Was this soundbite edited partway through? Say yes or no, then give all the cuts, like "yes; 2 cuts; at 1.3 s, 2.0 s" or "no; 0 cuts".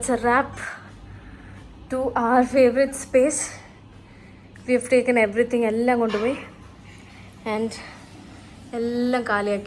no; 0 cuts